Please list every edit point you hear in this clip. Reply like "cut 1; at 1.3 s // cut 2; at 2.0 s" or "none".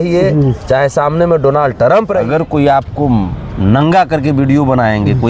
cut 1; at 2.3 s